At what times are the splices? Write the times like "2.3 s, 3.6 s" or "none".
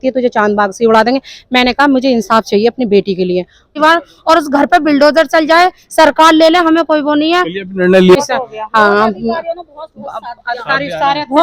3.8 s, 8.2 s